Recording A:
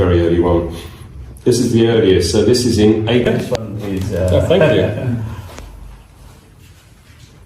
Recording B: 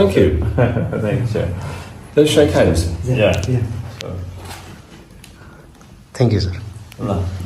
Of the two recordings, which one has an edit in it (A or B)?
A